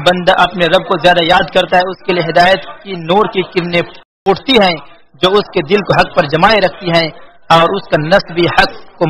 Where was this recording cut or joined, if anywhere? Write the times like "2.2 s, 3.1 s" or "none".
4.0 s